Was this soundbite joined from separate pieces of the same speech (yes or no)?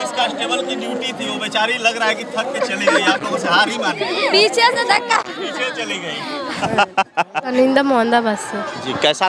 yes